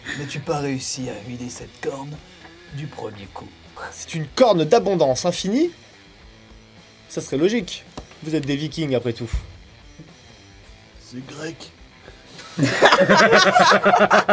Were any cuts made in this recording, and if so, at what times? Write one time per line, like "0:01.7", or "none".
0:03.7